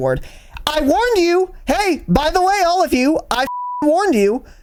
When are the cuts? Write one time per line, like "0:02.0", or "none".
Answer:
none